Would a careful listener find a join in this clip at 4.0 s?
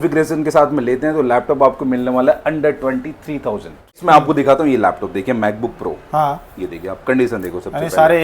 yes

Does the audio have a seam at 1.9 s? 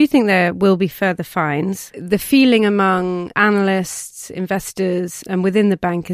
yes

